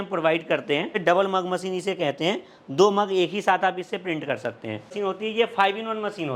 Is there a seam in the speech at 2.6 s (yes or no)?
no